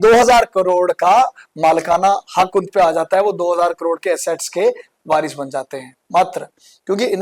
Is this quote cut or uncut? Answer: uncut